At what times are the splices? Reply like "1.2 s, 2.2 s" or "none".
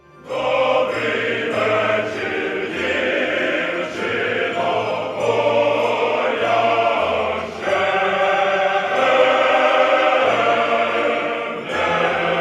8.1 s